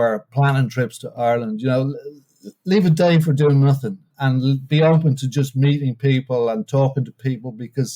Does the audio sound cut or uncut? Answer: cut